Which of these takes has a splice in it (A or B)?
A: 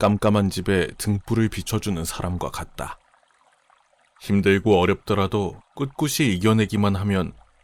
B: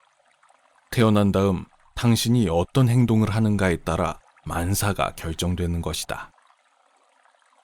B